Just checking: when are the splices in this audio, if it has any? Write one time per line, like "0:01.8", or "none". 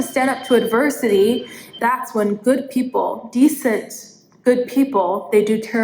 none